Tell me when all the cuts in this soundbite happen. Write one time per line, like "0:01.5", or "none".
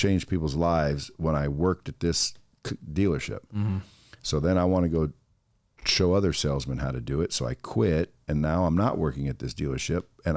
none